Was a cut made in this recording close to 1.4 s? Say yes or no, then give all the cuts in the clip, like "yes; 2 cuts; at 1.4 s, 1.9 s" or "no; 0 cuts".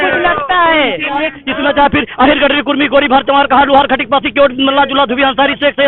yes; 1 cut; at 1.4 s